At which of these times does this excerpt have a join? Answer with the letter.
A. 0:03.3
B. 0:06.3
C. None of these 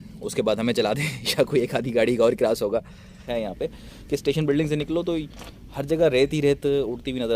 A